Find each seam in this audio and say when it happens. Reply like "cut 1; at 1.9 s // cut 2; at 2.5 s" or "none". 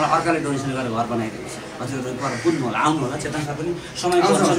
none